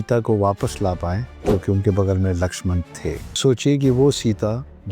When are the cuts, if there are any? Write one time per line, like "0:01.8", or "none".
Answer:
0:01.3
0:03.4